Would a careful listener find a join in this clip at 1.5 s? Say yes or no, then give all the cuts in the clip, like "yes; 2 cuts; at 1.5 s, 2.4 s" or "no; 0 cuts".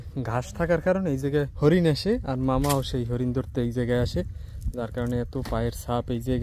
yes; 1 cut; at 1.5 s